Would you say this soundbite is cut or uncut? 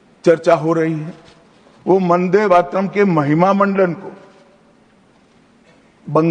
uncut